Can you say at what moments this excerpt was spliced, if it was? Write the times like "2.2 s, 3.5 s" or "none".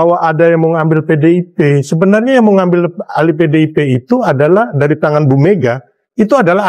none